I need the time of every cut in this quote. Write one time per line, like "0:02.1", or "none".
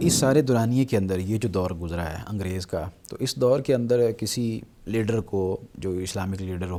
none